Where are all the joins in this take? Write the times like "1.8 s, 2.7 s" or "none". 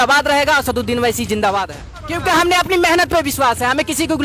2.1 s

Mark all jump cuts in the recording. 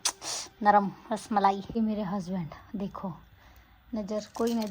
1.8 s

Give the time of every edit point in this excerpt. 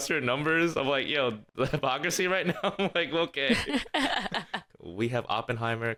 none

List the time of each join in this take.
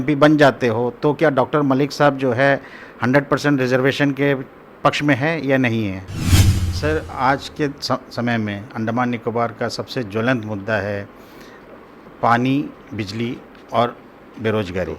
6.4 s

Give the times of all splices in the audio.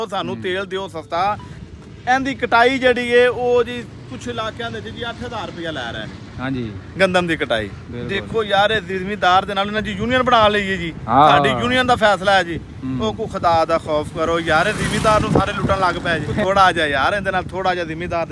1.5 s, 16.4 s

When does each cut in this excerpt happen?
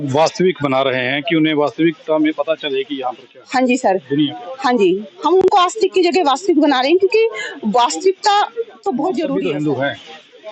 9.3 s

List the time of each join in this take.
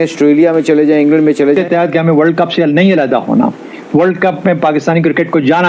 1.6 s

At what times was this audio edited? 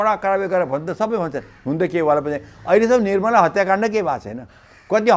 none

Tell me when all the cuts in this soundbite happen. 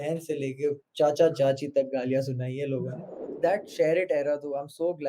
3.3 s

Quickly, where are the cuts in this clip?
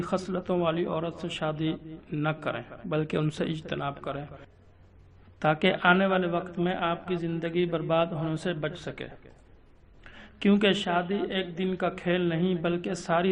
7.2 s

